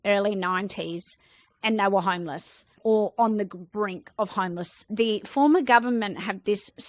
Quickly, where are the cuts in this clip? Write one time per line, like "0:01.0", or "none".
0:04.9